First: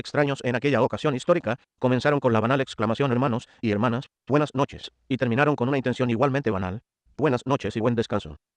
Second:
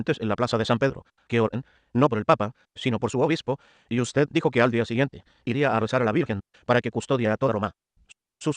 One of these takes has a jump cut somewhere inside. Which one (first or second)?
second